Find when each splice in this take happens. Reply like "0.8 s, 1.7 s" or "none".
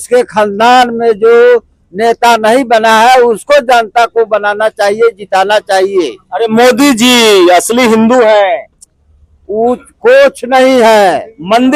none